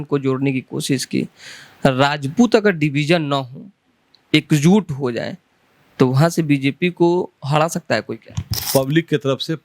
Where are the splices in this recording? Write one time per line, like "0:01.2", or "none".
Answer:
0:08.7

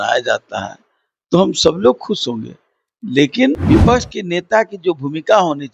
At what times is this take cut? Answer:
0:03.6

